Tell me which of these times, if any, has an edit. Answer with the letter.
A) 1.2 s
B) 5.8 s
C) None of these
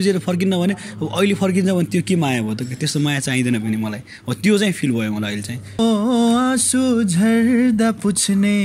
B